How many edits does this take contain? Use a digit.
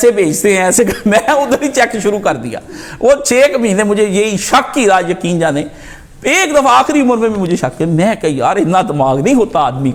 0